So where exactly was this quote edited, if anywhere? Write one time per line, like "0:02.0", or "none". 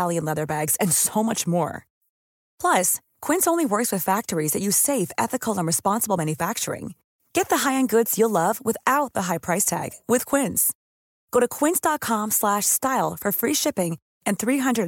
none